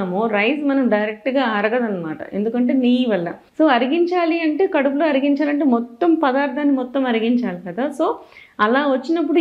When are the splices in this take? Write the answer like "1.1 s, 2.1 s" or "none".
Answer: 3.4 s

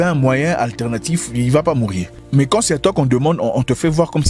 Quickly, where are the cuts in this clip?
none

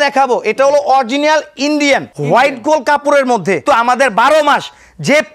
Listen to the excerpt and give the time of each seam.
2.1 s, 3.6 s

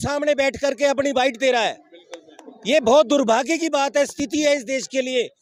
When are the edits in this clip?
none

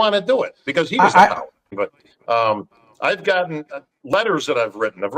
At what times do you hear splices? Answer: 1.6 s

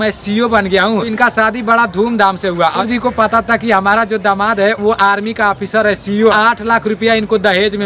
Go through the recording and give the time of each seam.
1.1 s, 2.8 s, 6.3 s

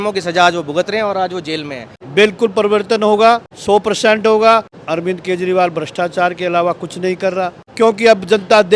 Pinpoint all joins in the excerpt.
1.9 s, 3.5 s, 4.8 s, 7.6 s

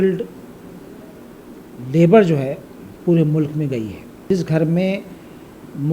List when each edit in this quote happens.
4.2 s

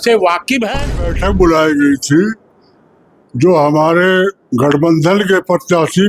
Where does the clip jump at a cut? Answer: 1.2 s

